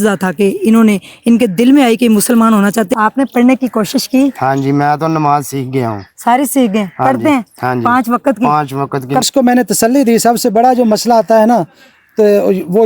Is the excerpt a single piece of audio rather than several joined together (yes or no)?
no